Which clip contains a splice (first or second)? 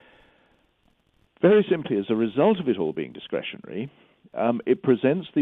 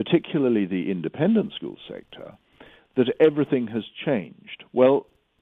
first